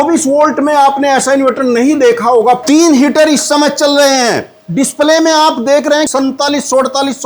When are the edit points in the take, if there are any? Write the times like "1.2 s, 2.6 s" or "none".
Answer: 2.6 s, 6.1 s